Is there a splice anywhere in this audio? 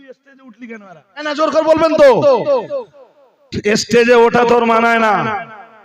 yes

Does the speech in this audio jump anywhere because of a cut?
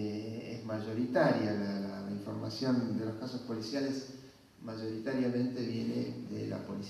yes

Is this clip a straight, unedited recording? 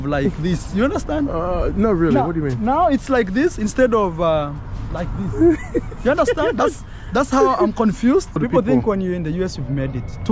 no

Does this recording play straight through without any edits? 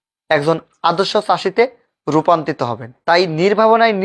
no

